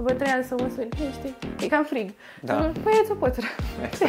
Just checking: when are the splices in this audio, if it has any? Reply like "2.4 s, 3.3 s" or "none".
none